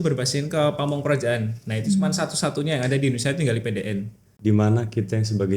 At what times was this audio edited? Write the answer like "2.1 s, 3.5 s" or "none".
4.3 s

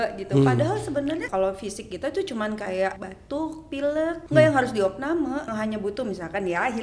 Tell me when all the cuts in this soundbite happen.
1.3 s, 3.1 s, 4.2 s, 5.5 s

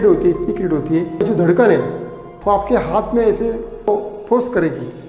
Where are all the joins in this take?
1.2 s, 3.9 s

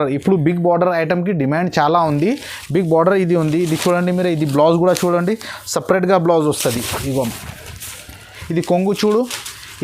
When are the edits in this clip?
8.4 s

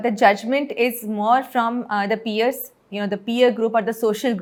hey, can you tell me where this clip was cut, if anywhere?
none

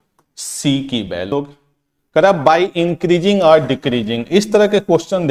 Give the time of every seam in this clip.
1.4 s

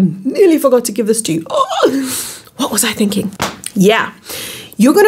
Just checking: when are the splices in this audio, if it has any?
3.3 s

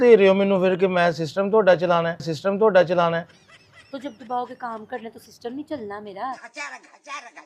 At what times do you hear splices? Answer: none

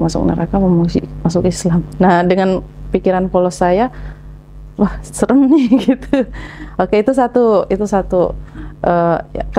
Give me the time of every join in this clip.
none

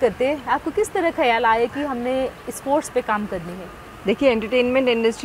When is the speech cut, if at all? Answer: none

